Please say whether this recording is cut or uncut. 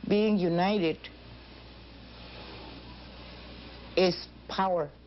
uncut